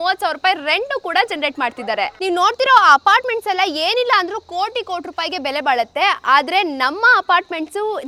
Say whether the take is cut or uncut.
uncut